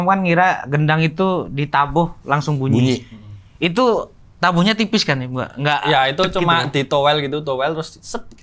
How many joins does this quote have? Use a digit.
0